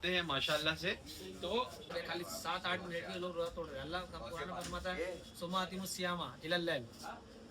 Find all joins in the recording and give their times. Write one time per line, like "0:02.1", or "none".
0:01.9